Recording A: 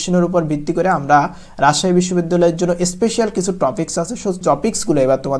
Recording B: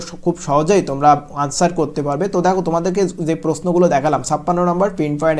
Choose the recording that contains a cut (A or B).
A